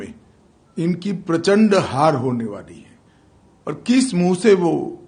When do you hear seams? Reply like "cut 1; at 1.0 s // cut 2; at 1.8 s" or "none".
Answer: none